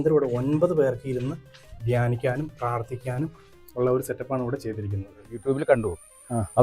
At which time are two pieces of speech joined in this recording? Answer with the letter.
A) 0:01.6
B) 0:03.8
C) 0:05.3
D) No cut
C